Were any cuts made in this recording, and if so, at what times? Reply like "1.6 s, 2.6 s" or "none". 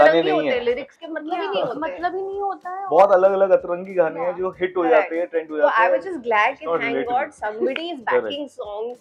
none